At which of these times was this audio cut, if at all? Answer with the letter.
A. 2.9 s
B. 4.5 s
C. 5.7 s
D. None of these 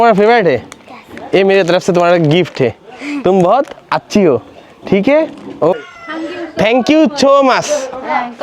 C